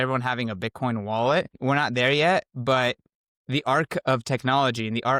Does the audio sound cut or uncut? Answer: cut